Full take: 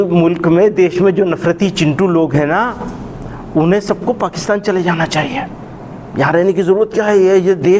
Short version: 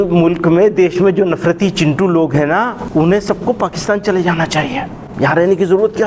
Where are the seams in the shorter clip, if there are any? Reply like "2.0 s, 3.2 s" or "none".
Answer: 2.8 s, 5.0 s